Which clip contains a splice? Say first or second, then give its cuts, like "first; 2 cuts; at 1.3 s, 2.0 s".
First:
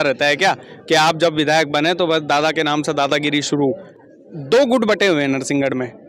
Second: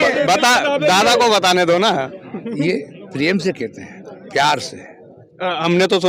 first; 1 cut; at 3.9 s